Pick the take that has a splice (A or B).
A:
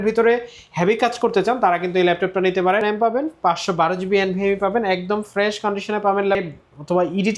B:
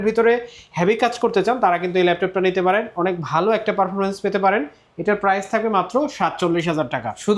A